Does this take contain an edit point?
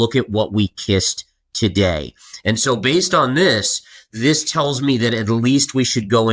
no; 0 cuts

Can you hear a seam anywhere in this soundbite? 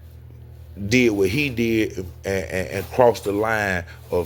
no; 0 cuts

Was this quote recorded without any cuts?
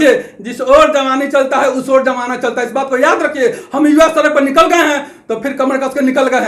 yes; 0 cuts

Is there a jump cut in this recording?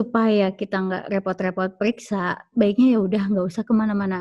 no; 0 cuts

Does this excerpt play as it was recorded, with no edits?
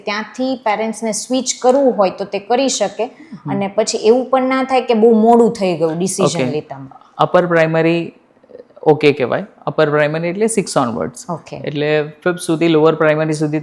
yes; 0 cuts

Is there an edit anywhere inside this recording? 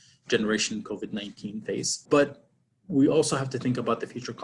yes; 1 cut; at 2.0 s

